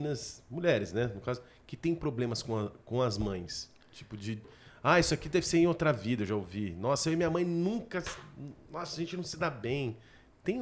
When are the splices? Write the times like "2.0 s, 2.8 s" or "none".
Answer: none